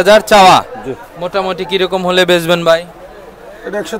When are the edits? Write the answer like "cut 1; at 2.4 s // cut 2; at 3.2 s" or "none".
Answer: none